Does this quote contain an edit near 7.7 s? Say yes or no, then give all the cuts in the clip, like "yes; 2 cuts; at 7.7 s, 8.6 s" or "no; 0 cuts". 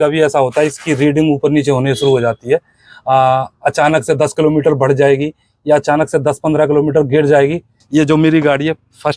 yes; 1 cut; at 7.7 s